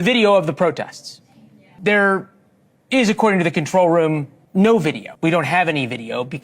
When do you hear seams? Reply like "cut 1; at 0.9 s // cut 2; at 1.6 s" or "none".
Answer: cut 1; at 1.7 s // cut 2; at 4.4 s // cut 3; at 5.1 s

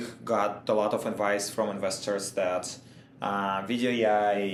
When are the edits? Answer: none

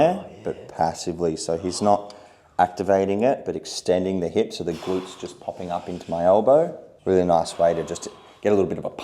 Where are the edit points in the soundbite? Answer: cut 1; at 6.9 s

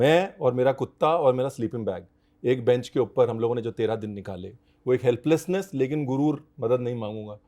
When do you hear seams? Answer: none

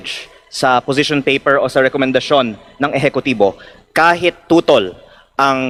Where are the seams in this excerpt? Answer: none

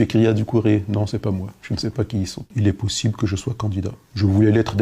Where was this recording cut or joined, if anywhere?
cut 1; at 2.5 s

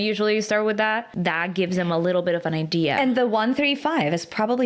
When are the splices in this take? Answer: cut 1; at 1.1 s

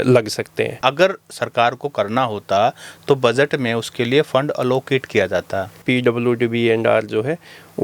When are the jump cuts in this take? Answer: cut 1; at 0.8 s // cut 2; at 5.7 s

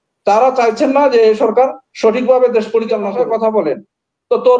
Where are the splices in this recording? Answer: cut 1; at 3.2 s

